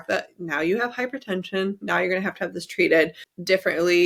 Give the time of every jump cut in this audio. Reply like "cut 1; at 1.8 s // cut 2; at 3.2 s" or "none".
none